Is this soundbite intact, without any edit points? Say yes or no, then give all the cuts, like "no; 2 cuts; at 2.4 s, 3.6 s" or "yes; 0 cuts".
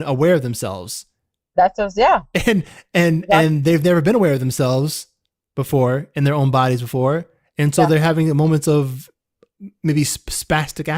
yes; 0 cuts